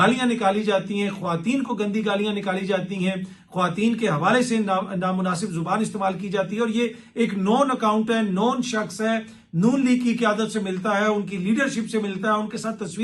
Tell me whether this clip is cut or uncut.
uncut